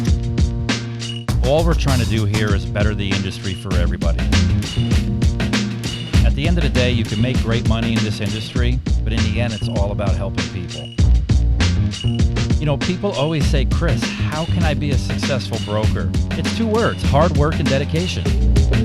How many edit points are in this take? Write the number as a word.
zero